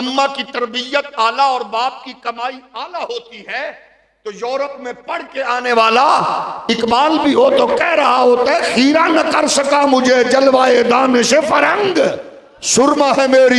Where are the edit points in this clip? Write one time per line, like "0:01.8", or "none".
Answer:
none